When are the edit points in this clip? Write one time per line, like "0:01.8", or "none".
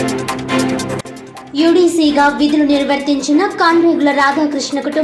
0:01.0